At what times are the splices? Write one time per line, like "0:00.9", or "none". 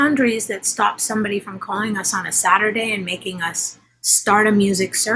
none